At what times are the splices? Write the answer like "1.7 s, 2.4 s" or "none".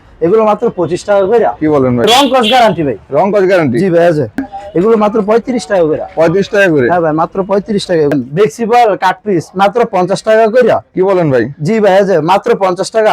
2.1 s, 4.4 s, 8.1 s